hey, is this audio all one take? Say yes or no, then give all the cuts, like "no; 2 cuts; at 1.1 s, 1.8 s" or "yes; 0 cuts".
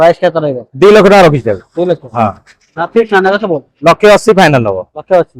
yes; 0 cuts